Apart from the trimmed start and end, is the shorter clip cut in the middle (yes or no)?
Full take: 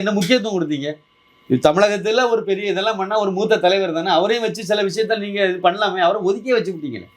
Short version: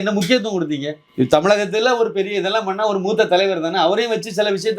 yes